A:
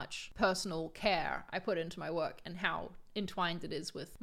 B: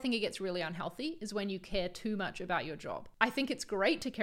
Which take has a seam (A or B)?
B